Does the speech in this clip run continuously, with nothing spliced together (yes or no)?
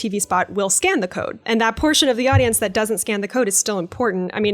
no